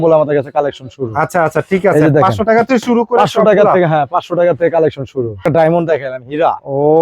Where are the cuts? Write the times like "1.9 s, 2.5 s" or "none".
5.4 s